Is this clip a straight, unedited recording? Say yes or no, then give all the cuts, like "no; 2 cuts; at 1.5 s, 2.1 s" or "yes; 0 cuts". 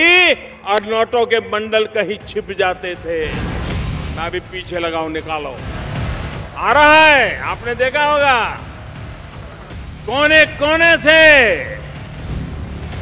yes; 0 cuts